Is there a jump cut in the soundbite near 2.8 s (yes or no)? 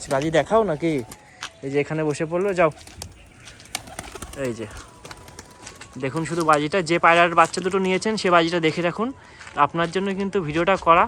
no